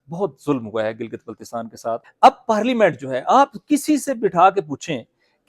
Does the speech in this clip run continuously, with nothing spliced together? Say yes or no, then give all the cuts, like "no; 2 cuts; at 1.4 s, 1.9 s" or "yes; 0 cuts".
no; 1 cut; at 2.1 s